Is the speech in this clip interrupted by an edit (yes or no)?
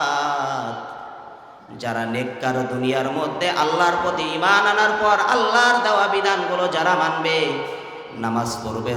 no